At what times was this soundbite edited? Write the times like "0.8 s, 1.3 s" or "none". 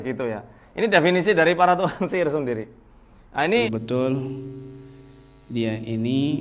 3.7 s